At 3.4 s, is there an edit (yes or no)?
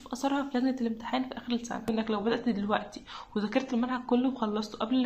no